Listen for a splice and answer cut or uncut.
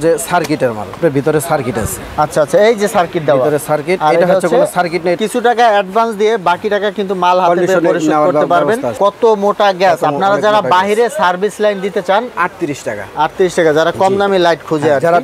cut